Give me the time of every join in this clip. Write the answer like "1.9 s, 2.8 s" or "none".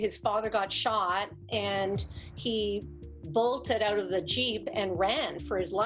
none